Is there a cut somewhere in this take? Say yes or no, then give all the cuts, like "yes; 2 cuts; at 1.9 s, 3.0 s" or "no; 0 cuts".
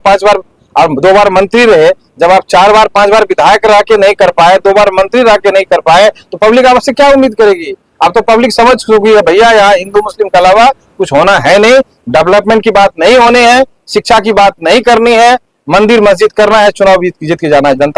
no; 0 cuts